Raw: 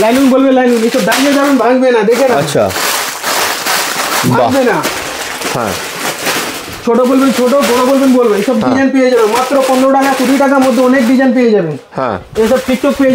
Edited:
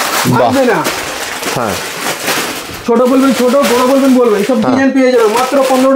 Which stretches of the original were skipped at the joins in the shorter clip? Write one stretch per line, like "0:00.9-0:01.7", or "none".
none